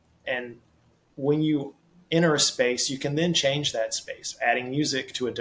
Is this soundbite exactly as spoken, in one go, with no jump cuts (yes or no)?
yes